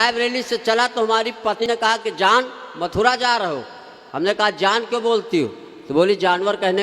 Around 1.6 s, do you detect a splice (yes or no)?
yes